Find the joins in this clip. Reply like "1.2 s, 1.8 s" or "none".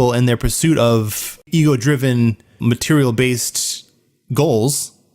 1.5 s, 2.6 s